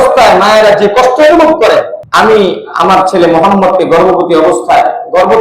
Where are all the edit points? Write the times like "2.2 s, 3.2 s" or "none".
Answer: 2.0 s